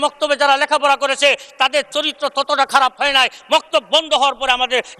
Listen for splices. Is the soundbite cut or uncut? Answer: uncut